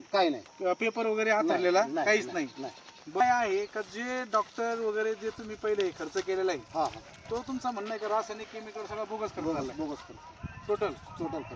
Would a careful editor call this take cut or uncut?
cut